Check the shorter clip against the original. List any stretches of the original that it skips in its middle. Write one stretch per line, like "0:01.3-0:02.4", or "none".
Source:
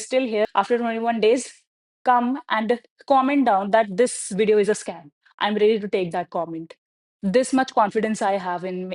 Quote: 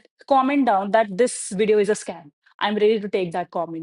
none